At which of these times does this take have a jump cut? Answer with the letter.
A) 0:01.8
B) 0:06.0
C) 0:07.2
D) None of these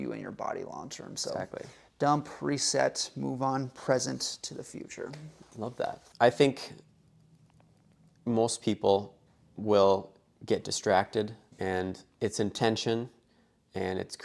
B